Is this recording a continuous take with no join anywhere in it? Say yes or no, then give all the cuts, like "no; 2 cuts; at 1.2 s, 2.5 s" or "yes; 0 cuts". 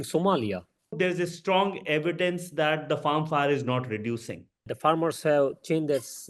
no; 2 cuts; at 0.9 s, 4.7 s